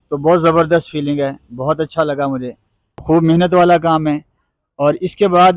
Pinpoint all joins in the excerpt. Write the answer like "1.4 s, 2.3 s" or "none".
3.0 s